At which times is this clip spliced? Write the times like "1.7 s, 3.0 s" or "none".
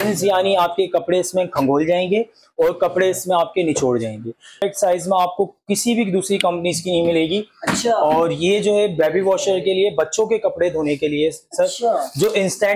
4.6 s